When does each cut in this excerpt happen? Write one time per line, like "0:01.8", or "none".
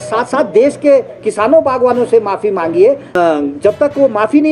0:03.1